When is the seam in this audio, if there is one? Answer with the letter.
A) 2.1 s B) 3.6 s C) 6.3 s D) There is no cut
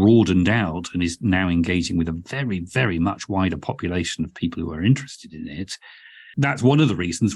C